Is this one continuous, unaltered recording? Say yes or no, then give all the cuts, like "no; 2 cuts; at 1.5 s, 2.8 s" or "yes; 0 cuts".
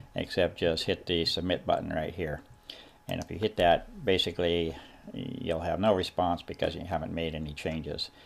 yes; 0 cuts